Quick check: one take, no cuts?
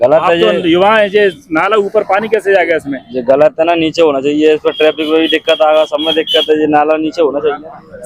yes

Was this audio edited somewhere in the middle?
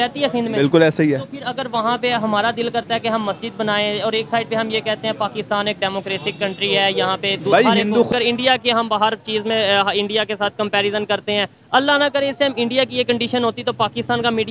yes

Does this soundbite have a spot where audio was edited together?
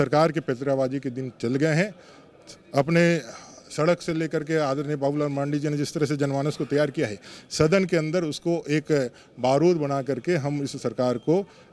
no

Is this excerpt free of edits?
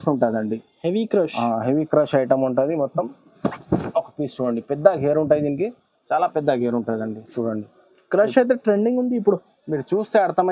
yes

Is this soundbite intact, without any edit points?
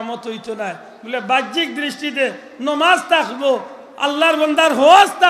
yes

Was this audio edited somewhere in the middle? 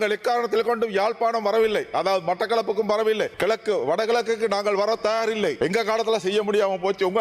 yes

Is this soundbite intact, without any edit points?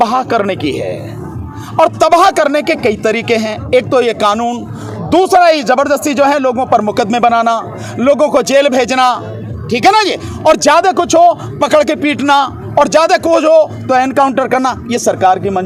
yes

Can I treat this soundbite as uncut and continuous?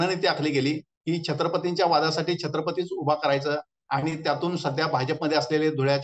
no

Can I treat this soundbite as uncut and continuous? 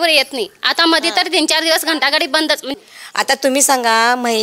no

